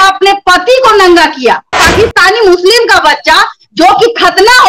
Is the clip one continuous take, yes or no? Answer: no